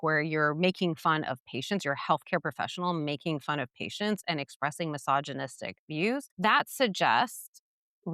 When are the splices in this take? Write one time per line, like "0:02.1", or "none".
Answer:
0:06.3

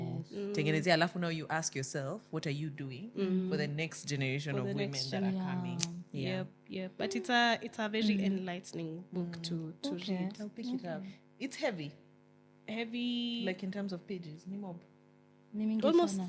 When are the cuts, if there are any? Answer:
none

